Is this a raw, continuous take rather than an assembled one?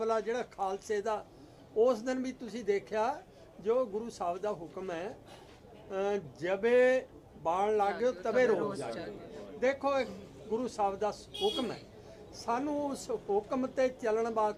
yes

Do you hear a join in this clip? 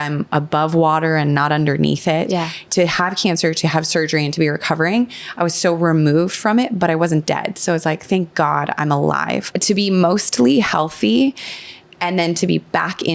yes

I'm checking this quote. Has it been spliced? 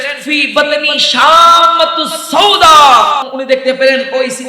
yes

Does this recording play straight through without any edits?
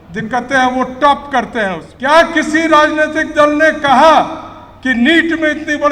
no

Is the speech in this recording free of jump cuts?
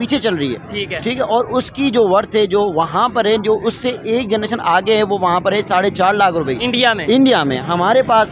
yes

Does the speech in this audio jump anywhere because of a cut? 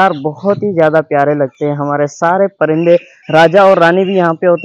no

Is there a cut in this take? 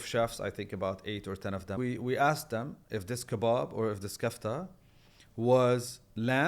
yes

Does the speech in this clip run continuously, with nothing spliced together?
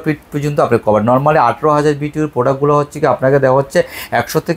yes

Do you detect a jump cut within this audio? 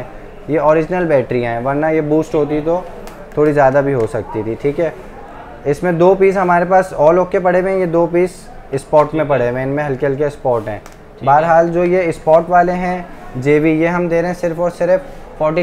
no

